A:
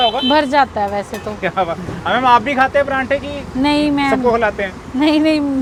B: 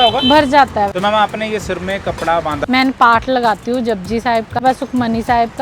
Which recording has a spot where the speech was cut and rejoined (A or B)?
B